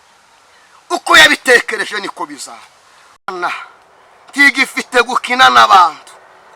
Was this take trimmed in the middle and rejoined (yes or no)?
yes